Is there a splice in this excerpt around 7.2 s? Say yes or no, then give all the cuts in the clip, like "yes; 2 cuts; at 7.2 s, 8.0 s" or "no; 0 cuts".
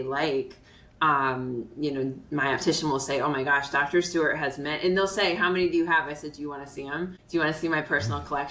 yes; 1 cut; at 7.2 s